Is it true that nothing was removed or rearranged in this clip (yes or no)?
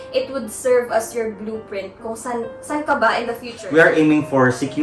no